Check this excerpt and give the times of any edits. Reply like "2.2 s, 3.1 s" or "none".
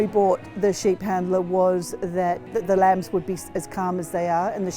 2.5 s